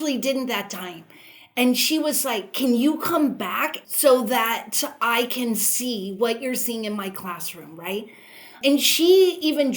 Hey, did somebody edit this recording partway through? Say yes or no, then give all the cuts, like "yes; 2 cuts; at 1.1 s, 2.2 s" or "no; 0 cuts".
yes; 2 cuts; at 3.8 s, 8.6 s